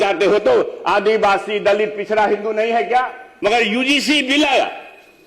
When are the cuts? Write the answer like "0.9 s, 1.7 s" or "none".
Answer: 3.2 s